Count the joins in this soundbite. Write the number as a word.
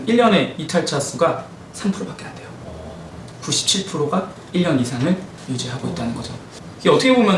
zero